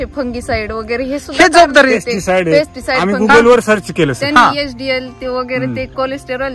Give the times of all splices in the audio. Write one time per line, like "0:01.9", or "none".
none